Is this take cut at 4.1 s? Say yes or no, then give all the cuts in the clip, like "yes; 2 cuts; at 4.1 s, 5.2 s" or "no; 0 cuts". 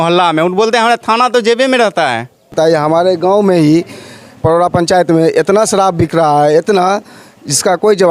no; 1 cut; at 2.5 s